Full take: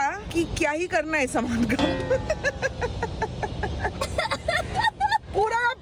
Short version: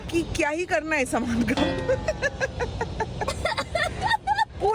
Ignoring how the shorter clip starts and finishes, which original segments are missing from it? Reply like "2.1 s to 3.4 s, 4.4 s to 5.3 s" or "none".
3.5 s to 4.0 s